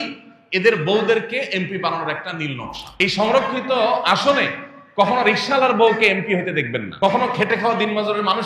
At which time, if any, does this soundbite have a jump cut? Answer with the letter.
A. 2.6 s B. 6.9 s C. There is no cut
B